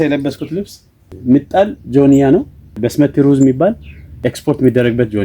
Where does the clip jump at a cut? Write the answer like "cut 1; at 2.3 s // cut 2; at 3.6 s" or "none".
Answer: cut 1; at 1.1 s // cut 2; at 2.7 s // cut 3; at 4.1 s